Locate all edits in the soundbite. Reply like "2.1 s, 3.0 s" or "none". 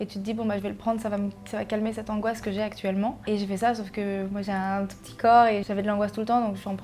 3.2 s, 5.7 s